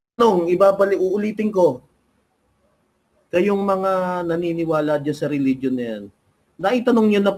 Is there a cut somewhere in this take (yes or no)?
no